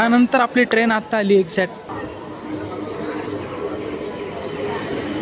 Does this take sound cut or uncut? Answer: cut